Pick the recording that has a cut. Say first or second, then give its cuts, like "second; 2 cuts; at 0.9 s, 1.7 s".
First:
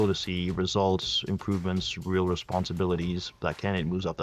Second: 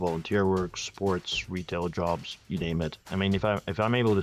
second; 1 cut; at 3.0 s